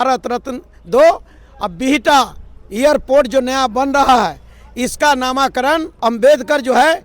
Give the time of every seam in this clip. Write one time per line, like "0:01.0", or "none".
0:05.9